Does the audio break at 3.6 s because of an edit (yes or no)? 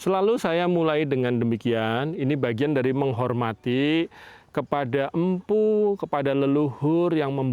no